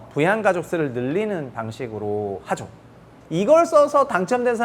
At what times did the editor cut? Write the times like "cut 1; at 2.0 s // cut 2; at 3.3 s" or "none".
cut 1; at 3.1 s

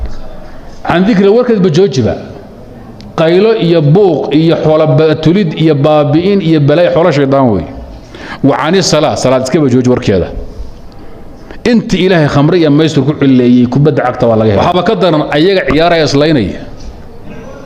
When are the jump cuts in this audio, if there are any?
cut 1; at 14.6 s

